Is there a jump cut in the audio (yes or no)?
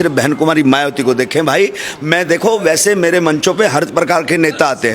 no